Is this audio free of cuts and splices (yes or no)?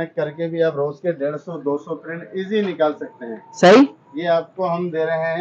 yes